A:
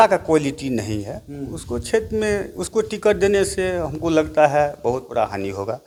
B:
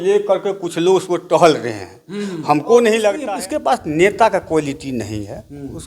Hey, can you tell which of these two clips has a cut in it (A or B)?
B